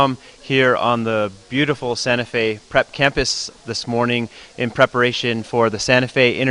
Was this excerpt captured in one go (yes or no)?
yes